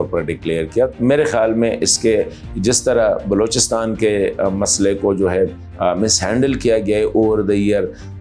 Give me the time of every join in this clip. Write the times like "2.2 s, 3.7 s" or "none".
0.9 s